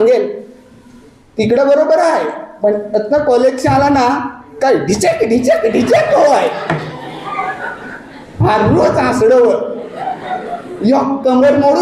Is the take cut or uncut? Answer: uncut